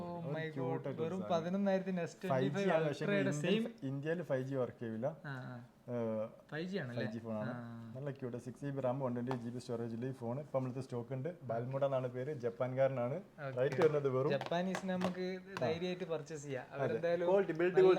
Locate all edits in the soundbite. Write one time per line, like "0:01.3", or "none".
none